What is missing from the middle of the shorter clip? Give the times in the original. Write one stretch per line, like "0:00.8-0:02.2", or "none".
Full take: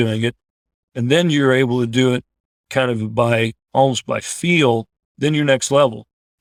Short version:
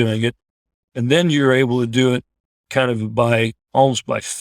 none